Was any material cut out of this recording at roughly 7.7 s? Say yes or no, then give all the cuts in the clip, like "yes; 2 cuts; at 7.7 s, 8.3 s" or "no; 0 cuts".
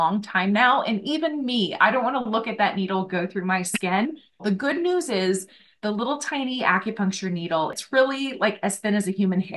yes; 2 cuts; at 4.4 s, 7.7 s